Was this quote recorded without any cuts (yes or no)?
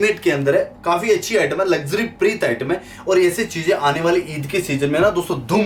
yes